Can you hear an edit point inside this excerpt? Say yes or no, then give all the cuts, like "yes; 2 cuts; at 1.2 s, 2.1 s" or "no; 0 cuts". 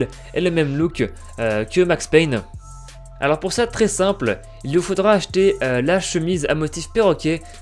no; 0 cuts